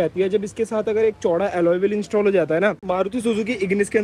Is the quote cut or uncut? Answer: cut